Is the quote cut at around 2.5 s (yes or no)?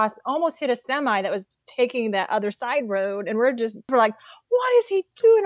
no